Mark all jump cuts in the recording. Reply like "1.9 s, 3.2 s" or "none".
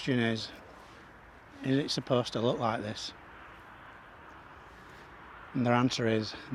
none